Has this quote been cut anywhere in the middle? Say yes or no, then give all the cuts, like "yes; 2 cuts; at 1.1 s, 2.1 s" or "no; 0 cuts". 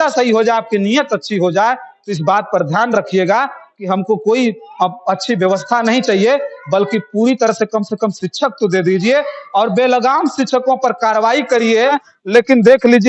yes; 1 cut; at 12.1 s